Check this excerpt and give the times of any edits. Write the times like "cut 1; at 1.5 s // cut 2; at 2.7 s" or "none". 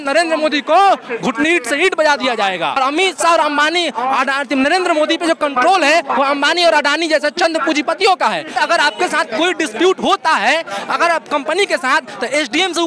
cut 1; at 2.8 s // cut 2; at 8.6 s

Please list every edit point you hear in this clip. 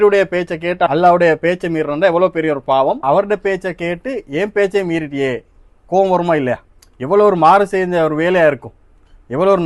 cut 1; at 3.0 s

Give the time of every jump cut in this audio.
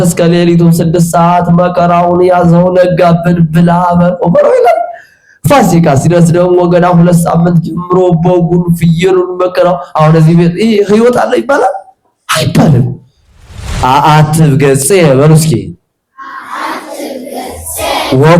cut 1; at 13.6 s

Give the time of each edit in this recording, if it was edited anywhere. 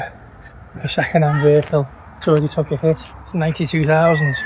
none

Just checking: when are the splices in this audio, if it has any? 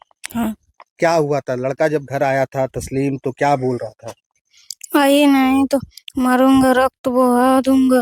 none

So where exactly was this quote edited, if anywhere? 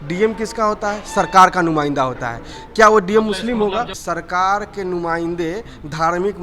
cut 1; at 4.0 s

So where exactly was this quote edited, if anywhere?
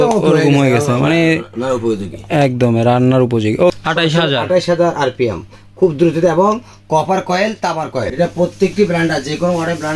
cut 1; at 3.8 s // cut 2; at 8.1 s

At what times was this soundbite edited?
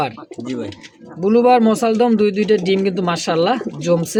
none

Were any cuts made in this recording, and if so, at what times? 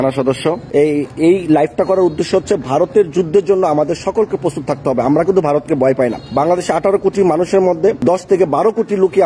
cut 1; at 6.2 s // cut 2; at 8.0 s

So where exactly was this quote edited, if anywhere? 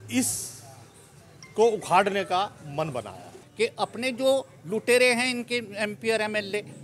cut 1; at 3.4 s

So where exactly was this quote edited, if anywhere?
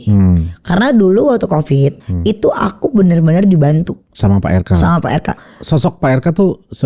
cut 1; at 2.1 s // cut 2; at 4.0 s // cut 3; at 5.3 s

